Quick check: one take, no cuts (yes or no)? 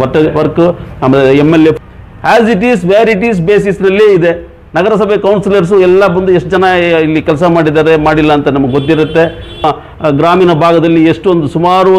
no